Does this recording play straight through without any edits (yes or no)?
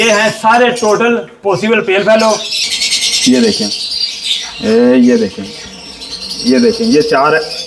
no